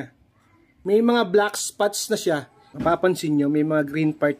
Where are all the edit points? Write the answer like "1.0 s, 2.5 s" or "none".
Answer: 2.6 s